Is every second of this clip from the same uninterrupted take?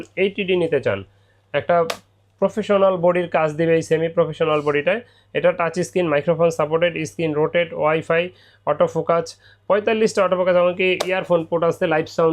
yes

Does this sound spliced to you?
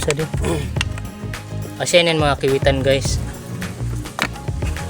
no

